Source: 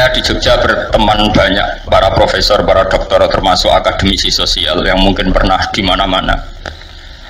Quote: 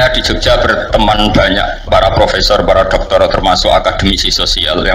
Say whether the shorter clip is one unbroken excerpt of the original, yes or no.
yes